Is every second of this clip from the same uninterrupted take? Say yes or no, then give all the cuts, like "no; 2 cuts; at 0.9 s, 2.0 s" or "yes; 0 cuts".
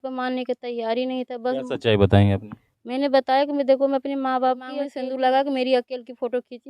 no; 1 cut; at 4.8 s